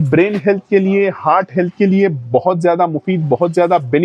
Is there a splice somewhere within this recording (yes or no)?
no